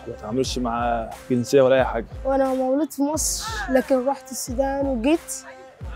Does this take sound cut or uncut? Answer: cut